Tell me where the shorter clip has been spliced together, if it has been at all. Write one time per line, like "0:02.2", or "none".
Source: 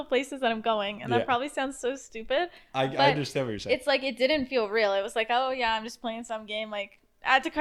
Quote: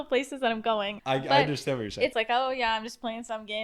0:00.9
0:02.1